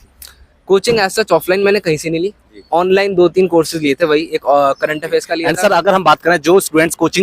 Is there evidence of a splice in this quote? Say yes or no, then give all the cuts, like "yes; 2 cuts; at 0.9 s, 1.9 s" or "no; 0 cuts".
yes; 1 cut; at 5.4 s